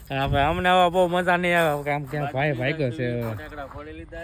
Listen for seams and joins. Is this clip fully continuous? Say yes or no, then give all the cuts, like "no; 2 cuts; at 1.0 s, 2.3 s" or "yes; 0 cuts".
yes; 0 cuts